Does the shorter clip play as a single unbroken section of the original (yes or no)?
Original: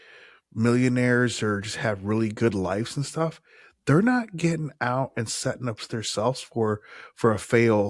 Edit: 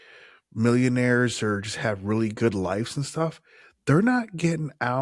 yes